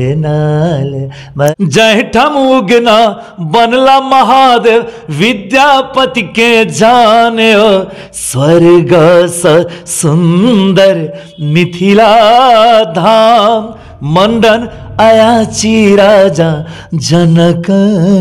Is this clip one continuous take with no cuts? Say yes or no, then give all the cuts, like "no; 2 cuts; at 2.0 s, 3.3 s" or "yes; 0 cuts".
no; 1 cut; at 1.5 s